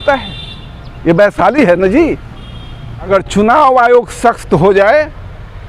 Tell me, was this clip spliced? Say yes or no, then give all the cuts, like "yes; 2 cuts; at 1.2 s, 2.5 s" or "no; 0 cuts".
yes; 1 cut; at 3.1 s